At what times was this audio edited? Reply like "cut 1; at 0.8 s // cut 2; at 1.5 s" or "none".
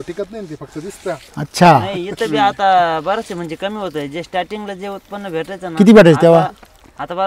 none